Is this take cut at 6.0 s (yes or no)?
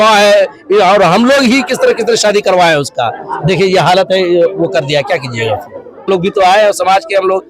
no